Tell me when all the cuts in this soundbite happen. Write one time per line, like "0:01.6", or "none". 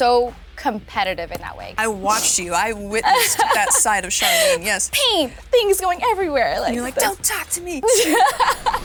none